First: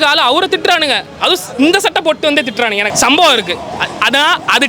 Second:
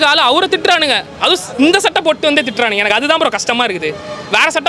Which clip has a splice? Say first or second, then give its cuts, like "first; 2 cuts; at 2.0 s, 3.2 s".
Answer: first; 1 cut; at 2.9 s